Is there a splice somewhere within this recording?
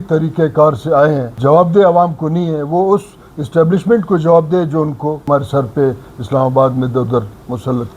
yes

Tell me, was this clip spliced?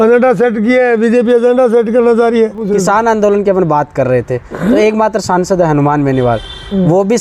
yes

